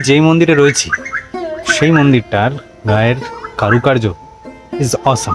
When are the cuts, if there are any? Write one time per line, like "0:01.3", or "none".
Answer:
none